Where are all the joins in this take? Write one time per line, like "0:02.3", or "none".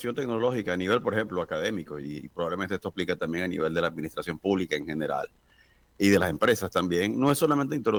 none